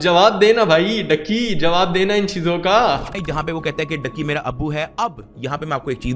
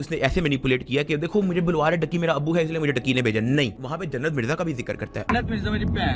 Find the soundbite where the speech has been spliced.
first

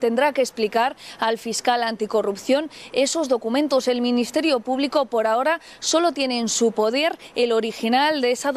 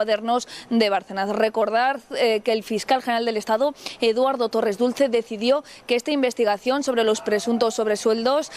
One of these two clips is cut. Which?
first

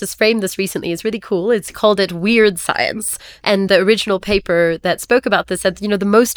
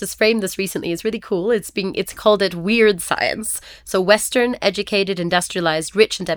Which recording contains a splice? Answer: first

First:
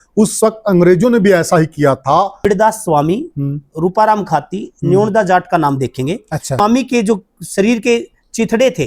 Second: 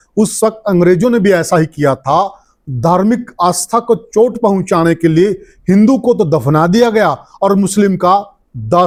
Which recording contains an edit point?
first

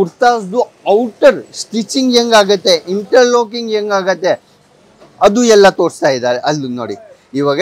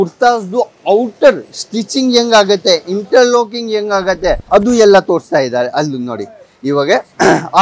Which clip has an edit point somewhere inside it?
second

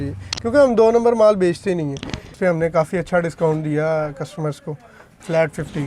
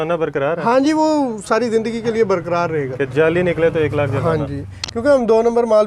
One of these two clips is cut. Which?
first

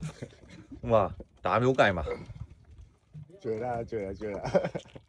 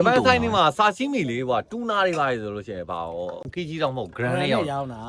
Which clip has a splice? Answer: second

